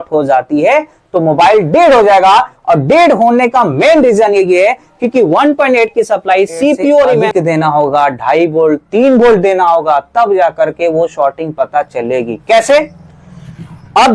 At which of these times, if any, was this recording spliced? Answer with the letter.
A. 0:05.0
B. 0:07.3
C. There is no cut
B